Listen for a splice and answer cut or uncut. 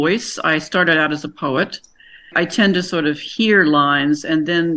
cut